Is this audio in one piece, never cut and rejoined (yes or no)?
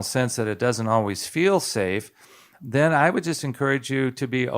no